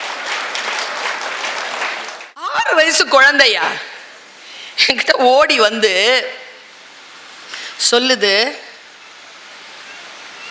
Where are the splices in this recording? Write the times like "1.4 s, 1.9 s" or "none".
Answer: 2.5 s